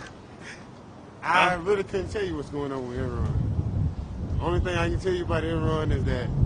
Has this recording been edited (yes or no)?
no